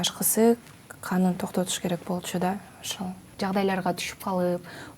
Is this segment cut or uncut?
cut